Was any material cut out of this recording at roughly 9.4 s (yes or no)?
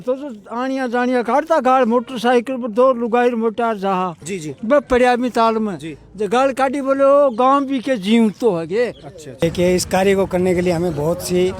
yes